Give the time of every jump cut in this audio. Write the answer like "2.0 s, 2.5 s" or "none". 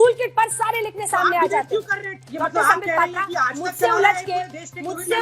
2.3 s